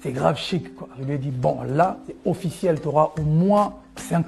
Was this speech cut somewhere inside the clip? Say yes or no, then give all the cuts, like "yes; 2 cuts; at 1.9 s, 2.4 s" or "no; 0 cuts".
yes; 1 cut; at 0.9 s